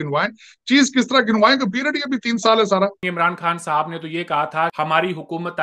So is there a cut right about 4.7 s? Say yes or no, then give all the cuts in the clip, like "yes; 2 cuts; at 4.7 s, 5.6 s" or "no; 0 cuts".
yes; 2 cuts; at 3.0 s, 4.7 s